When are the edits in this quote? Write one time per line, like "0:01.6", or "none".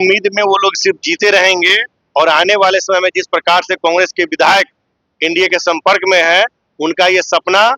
none